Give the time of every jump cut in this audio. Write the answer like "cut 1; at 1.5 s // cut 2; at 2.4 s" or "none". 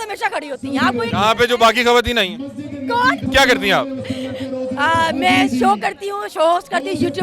cut 1; at 3.2 s

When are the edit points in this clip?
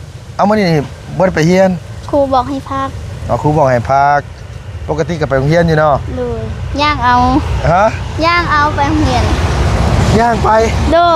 none

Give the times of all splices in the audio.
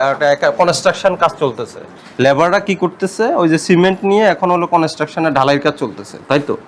cut 1; at 2.0 s

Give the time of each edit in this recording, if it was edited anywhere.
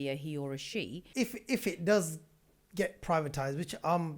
cut 1; at 1.0 s

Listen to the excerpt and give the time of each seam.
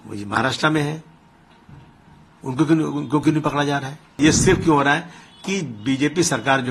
cut 1; at 4.2 s

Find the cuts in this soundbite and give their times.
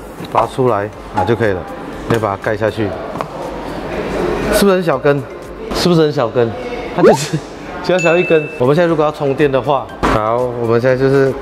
cut 1; at 8.5 s

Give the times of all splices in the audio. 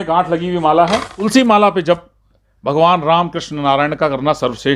cut 1; at 1.3 s

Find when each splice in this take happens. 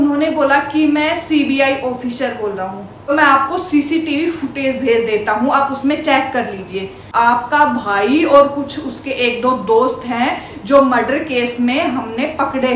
cut 1; at 3.1 s // cut 2; at 7.0 s

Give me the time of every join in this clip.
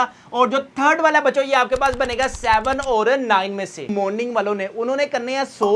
cut 1; at 3.9 s

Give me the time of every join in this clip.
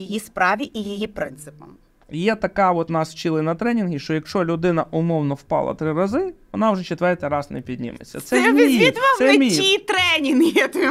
cut 1; at 2.0 s

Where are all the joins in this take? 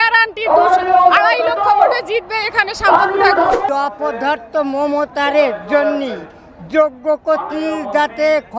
cut 1; at 3.7 s

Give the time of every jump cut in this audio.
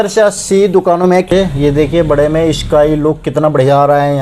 cut 1; at 1.3 s

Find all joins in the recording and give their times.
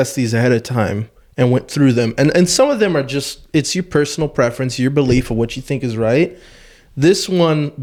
none

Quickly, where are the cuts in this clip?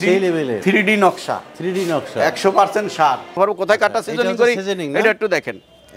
cut 1; at 3.4 s

